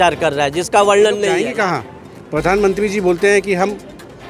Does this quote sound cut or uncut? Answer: cut